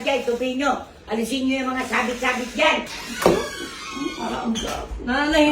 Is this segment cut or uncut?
cut